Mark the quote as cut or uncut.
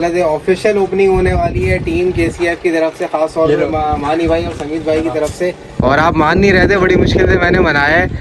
cut